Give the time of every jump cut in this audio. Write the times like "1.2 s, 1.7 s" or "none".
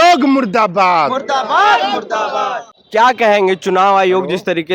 none